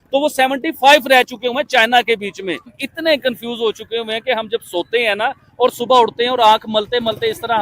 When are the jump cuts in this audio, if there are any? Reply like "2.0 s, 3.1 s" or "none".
2.7 s